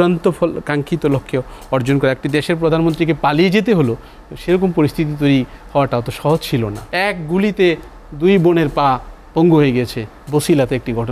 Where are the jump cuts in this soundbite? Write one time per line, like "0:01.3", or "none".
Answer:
0:06.8